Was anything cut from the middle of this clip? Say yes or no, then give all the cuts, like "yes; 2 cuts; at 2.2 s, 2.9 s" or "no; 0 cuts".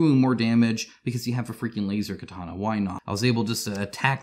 yes; 1 cut; at 3.0 s